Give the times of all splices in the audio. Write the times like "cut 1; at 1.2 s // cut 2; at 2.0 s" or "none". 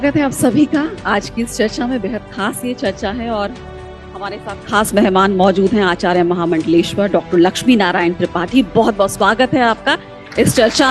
none